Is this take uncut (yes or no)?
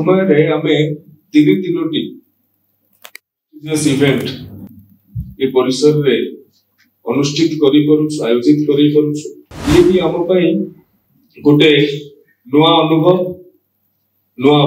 no